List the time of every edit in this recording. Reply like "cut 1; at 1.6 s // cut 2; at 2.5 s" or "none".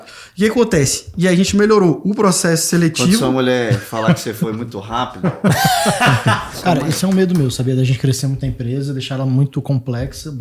cut 1; at 6.5 s